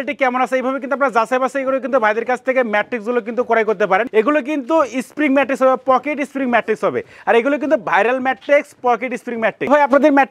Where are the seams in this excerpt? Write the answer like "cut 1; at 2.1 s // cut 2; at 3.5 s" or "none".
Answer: none

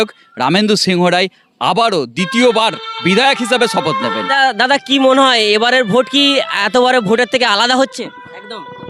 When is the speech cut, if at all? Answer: none

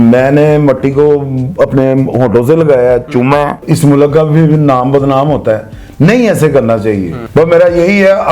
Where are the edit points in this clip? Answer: cut 1; at 3.7 s // cut 2; at 7.1 s

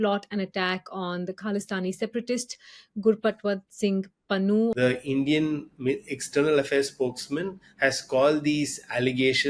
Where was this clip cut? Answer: cut 1; at 4.7 s

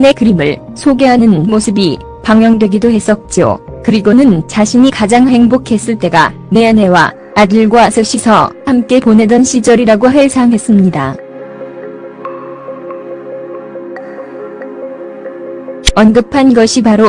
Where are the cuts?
cut 1; at 12.7 s

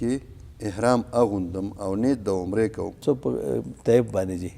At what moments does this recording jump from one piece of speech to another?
cut 1; at 3.0 s

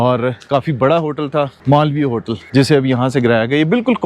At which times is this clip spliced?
cut 1; at 1.6 s // cut 2; at 2.4 s

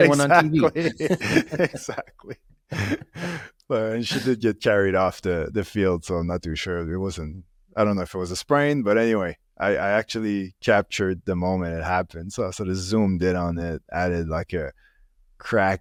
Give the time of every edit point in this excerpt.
none

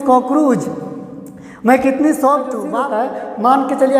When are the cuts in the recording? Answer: cut 1; at 2.6 s

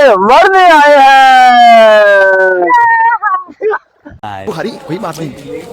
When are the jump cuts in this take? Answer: cut 1; at 4.5 s

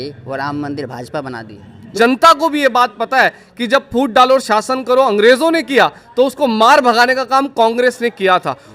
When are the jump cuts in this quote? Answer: cut 1; at 1.9 s

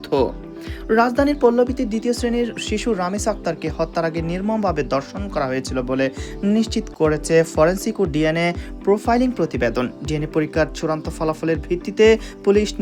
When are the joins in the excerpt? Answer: none

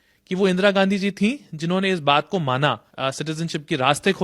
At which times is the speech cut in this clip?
cut 1; at 2.9 s

